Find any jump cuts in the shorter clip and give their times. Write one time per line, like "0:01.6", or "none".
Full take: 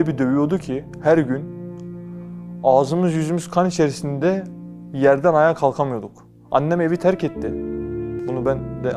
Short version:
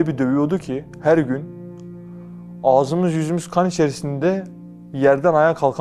none